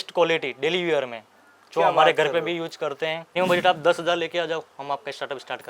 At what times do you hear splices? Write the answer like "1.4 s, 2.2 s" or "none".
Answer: 3.2 s